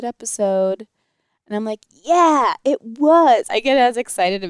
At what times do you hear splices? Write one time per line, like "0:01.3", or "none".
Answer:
0:03.5